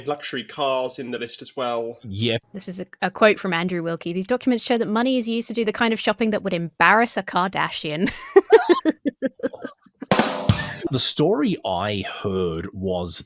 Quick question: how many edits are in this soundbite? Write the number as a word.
two